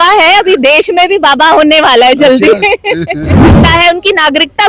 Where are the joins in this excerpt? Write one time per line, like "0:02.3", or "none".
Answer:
0:03.6